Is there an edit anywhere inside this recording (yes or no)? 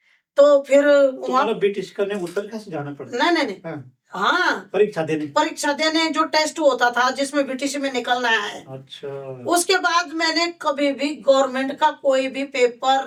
no